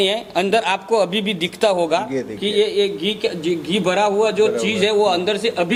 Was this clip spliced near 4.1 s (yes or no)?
no